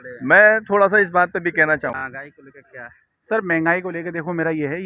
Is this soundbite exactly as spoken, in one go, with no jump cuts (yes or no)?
no